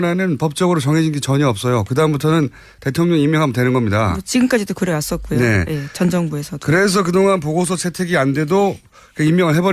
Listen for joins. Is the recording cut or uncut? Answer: uncut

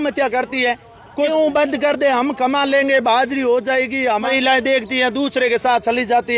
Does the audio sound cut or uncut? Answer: cut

